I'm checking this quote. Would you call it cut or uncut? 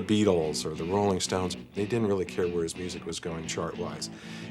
cut